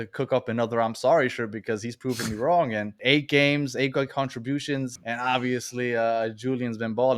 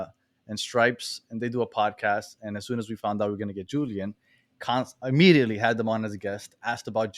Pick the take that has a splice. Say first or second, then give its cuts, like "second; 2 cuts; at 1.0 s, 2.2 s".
first; 2 cuts; at 3.0 s, 5.0 s